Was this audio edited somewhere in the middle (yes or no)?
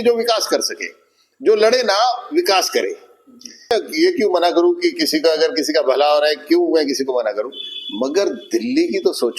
yes